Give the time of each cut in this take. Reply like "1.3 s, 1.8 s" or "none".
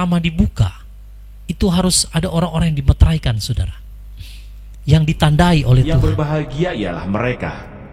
5.9 s